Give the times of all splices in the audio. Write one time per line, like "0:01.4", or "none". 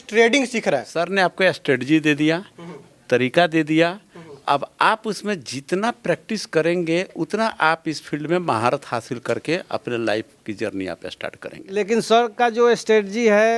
0:00.9
0:11.7